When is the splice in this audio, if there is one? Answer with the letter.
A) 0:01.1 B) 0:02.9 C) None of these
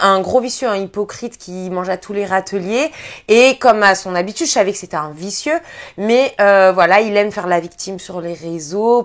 C